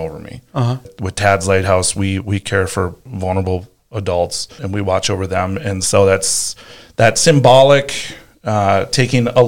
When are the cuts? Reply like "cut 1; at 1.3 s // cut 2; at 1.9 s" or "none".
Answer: cut 1; at 0.9 s // cut 2; at 3.1 s // cut 3; at 4.6 s